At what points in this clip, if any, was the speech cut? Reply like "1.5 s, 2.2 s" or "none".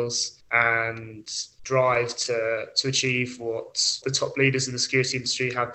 4.0 s